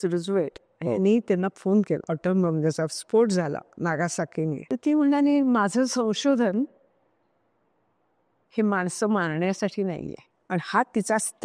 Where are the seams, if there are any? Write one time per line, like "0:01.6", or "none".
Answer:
0:02.1
0:04.6

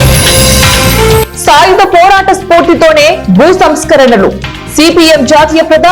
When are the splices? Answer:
0:01.3

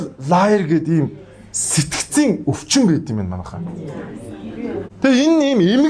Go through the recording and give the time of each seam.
0:04.9

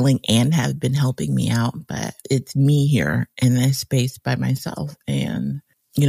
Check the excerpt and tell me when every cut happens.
0:02.2

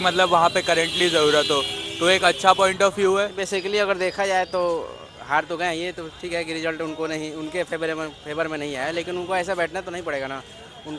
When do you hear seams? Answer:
0:03.4

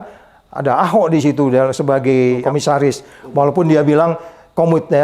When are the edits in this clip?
0:02.4

